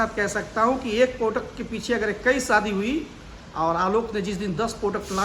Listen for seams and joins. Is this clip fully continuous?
yes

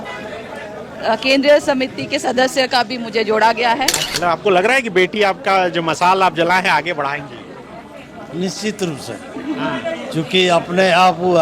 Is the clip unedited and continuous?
no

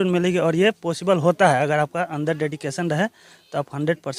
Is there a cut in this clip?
no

